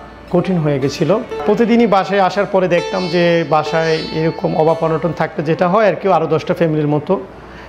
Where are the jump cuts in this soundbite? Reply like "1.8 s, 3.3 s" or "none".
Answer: 1.4 s